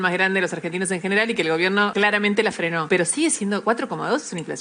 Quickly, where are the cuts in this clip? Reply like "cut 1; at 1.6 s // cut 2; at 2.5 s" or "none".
cut 1; at 1.9 s // cut 2; at 2.8 s // cut 3; at 3.6 s